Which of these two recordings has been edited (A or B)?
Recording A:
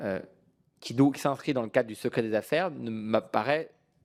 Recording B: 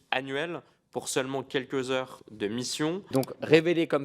B